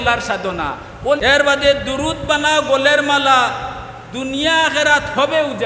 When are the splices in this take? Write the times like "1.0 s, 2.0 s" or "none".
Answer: 1.2 s